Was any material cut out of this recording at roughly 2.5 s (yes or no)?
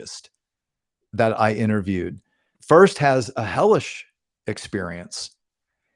yes